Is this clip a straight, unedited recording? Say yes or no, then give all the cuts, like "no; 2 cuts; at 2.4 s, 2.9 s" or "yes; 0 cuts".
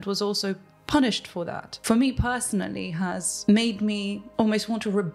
no; 3 cuts; at 1.6 s, 3.3 s, 4.2 s